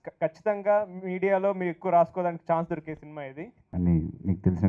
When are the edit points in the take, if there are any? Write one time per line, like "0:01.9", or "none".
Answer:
0:03.7